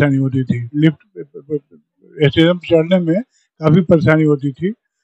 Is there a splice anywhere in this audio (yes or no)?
no